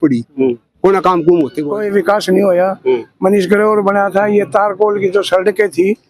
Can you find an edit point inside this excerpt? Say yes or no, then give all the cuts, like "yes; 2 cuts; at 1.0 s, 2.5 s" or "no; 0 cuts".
yes; 1 cut; at 1.7 s